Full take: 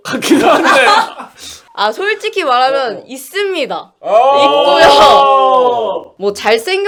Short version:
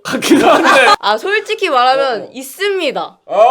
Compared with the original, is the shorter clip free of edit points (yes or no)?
no